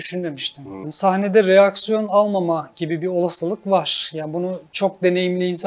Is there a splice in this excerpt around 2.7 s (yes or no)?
no